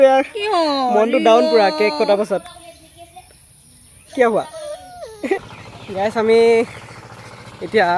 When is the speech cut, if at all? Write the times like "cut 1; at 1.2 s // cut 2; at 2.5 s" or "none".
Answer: cut 1; at 5.4 s